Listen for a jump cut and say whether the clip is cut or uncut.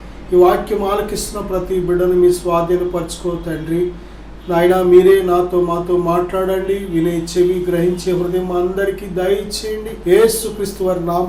cut